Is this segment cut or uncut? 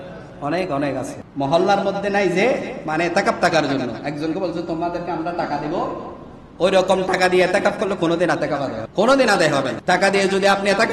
cut